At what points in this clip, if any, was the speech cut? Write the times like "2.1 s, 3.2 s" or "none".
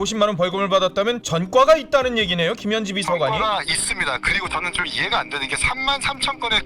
1.3 s

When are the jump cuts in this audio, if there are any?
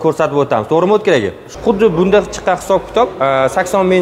1.4 s

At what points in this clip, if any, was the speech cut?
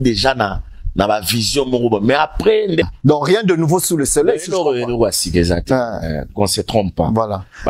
2.8 s

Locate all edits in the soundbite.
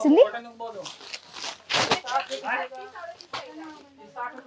none

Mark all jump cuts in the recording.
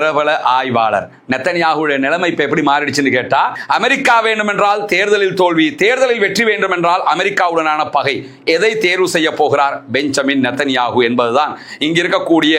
3.5 s

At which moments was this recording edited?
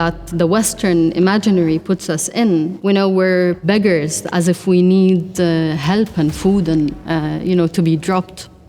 2.8 s, 3.6 s

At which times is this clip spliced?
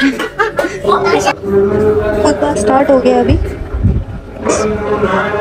1.3 s

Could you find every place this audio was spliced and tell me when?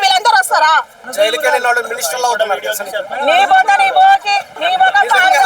1.0 s, 4.5 s

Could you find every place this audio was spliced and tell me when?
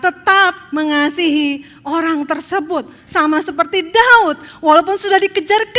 none

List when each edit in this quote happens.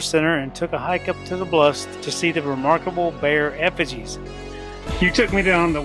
4.8 s

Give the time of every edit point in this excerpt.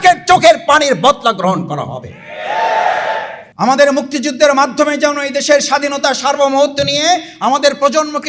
3.4 s

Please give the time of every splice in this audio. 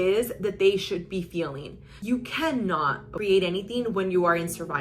1.9 s, 3.1 s

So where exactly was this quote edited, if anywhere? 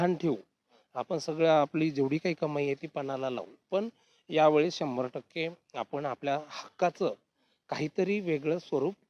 none

